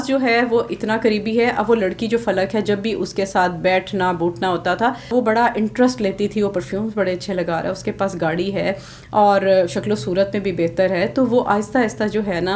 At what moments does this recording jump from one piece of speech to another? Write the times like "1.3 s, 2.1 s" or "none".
5.1 s